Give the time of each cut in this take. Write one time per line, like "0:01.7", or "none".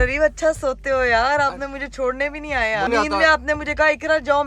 0:02.9